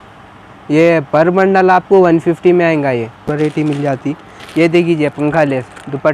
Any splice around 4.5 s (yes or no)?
no